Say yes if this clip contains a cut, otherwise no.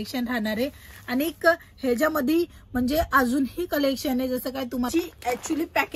yes